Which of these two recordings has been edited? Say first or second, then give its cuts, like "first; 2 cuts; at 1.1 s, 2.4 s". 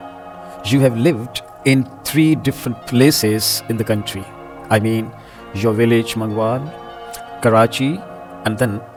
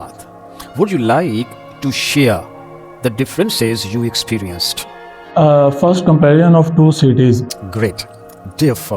second; 1 cut; at 7.5 s